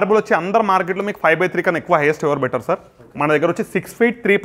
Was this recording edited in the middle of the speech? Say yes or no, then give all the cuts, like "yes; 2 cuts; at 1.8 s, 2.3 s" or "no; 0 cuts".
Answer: no; 0 cuts